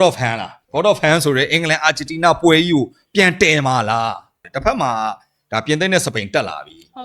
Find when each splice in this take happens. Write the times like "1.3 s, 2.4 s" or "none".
4.4 s